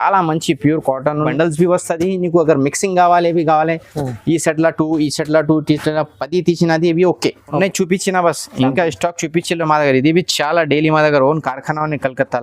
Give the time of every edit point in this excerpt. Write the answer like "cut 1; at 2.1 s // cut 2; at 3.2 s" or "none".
cut 1; at 1.3 s // cut 2; at 7.6 s